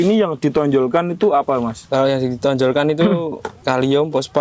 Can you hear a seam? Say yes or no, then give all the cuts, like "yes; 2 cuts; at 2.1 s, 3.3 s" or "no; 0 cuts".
no; 0 cuts